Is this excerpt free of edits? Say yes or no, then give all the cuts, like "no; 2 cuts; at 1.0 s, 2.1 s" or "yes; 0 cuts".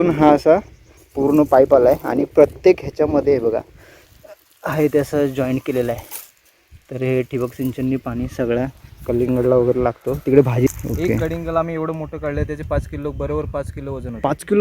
no; 1 cut; at 10.7 s